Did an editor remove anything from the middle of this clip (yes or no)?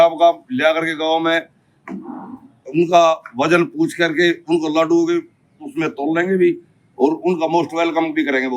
no